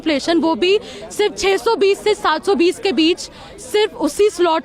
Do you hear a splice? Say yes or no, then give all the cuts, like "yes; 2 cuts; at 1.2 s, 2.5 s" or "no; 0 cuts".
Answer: no; 0 cuts